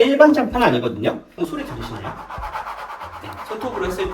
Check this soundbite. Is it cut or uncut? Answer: uncut